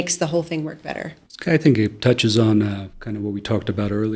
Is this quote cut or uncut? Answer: uncut